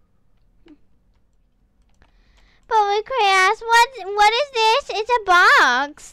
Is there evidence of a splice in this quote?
yes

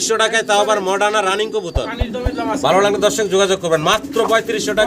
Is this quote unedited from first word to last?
yes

